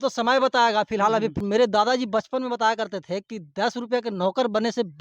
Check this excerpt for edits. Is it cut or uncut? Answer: cut